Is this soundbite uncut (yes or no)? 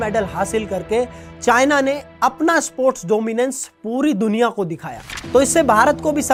yes